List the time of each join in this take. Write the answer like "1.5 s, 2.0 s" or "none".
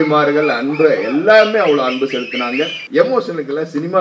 2.8 s